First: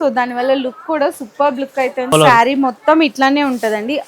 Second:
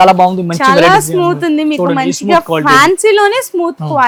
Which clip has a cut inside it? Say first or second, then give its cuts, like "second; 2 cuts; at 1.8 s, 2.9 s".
first; 1 cut; at 2.1 s